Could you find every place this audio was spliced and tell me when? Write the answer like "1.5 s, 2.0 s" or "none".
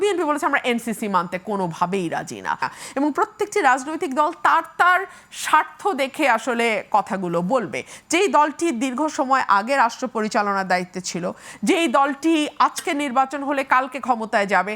2.7 s